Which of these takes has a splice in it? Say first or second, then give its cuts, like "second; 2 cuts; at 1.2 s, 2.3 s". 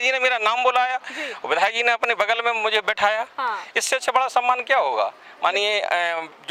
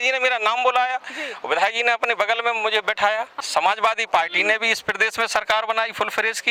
second; 1 cut; at 3.3 s